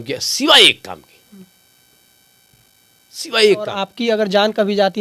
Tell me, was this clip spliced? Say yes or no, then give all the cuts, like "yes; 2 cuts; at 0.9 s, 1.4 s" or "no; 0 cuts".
yes; 1 cut; at 3.8 s